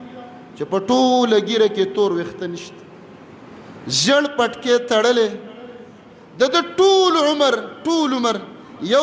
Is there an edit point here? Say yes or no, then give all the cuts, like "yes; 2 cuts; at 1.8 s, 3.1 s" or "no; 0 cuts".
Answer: no; 0 cuts